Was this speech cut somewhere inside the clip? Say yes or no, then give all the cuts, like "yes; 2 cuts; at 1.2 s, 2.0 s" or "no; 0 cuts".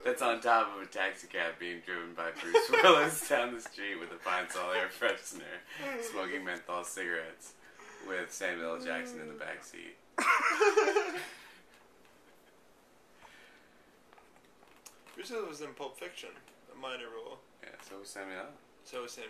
no; 0 cuts